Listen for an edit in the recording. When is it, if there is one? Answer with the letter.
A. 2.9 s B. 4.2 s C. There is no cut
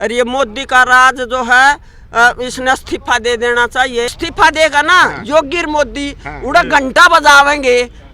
B